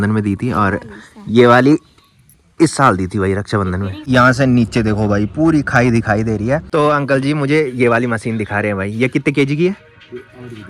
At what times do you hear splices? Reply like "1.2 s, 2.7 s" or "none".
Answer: 4.0 s, 6.6 s